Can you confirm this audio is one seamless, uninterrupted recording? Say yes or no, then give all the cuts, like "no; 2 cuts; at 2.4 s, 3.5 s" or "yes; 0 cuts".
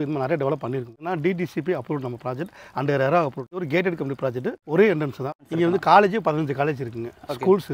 no; 4 cuts; at 1.0 s, 3.6 s, 4.6 s, 5.4 s